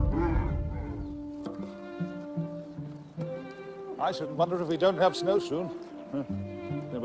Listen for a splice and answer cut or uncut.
cut